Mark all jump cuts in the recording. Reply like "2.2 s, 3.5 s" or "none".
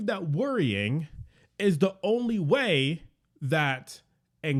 none